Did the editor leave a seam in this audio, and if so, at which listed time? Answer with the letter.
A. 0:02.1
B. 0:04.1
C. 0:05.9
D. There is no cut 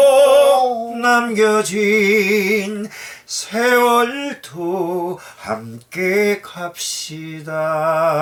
D